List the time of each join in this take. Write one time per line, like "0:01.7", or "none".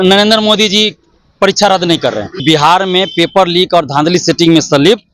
0:02.4